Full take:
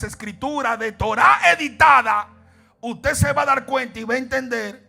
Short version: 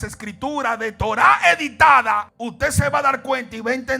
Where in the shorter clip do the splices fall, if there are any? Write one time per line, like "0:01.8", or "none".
0:02.4